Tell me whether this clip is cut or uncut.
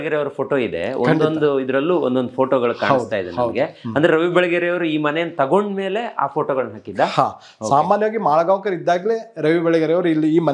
uncut